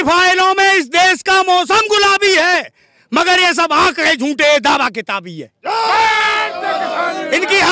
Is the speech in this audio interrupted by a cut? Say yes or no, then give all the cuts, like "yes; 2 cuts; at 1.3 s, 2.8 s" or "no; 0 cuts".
no; 0 cuts